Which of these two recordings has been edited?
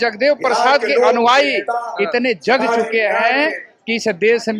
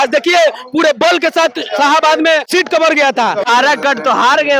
second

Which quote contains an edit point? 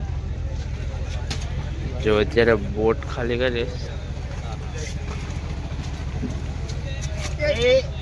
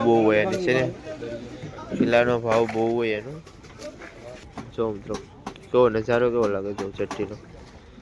second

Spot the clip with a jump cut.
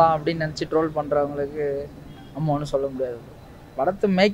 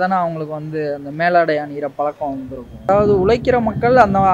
second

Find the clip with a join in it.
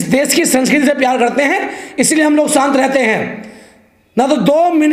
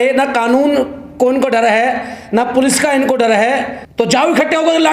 second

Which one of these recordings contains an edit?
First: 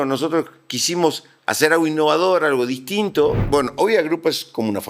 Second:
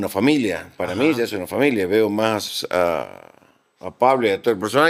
first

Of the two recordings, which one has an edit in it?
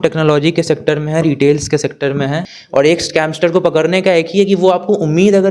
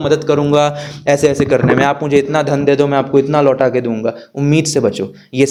first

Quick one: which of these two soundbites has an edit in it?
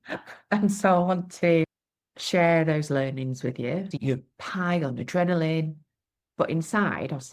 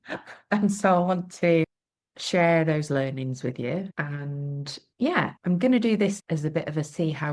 first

